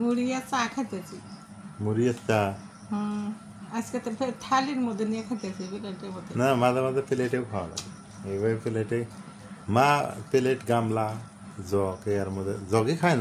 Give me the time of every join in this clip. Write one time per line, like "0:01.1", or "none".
none

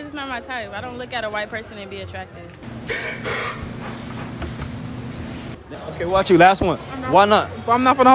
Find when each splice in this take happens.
0:05.7

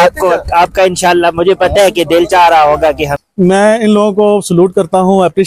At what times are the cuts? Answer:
0:03.1

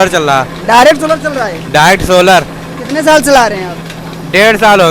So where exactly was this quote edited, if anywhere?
none

